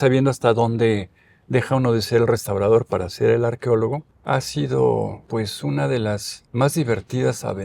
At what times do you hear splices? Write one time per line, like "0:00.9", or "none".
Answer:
0:04.1
0:05.2
0:06.4